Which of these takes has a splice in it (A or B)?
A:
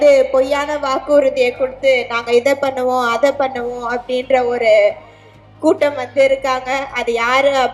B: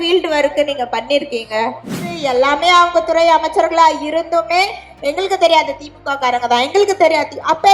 B